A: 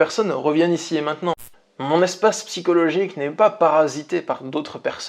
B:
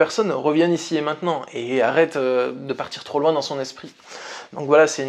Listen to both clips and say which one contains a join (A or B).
A